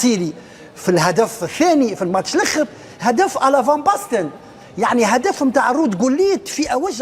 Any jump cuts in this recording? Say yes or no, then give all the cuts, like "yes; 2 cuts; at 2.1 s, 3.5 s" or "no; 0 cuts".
no; 0 cuts